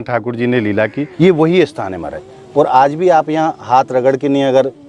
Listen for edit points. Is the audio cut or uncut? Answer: cut